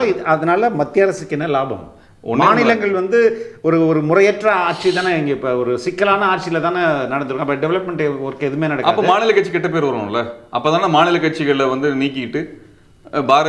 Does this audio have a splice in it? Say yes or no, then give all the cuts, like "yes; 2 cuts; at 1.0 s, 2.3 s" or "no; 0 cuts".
no; 0 cuts